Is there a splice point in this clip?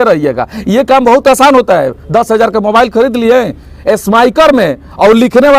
no; 0 cuts

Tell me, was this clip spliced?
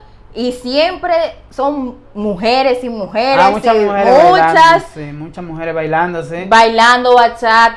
no; 0 cuts

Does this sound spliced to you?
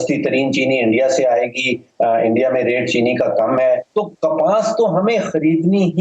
yes; 1 cut; at 3.9 s

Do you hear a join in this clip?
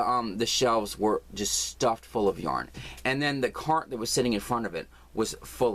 yes; 1 cut; at 2.7 s

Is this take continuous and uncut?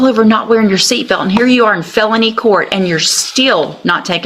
yes; 0 cuts

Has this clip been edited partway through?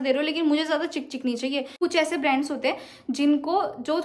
yes; 1 cut; at 1.7 s

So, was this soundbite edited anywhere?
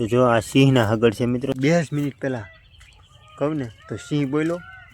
yes; 1 cut; at 1.9 s

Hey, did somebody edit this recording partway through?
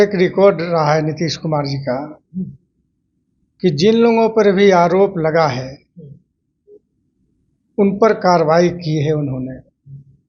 no; 0 cuts

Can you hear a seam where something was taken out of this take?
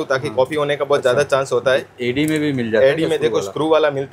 no; 0 cuts

